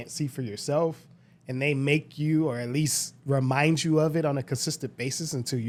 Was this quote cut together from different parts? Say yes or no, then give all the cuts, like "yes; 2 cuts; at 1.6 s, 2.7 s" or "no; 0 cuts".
no; 0 cuts